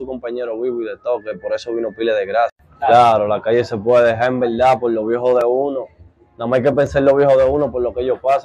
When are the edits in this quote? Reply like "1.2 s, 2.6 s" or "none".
2.6 s